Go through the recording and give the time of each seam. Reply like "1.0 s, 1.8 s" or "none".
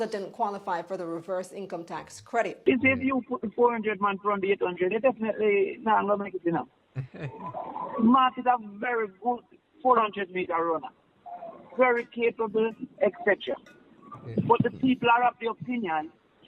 2.5 s